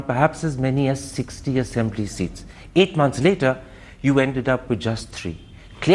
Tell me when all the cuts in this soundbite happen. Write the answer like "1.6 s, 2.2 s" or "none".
none